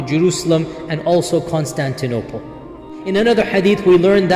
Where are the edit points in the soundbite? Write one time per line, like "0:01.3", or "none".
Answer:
0:02.9